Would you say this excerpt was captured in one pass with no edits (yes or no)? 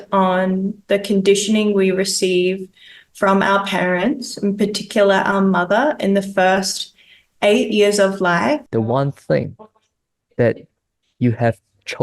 no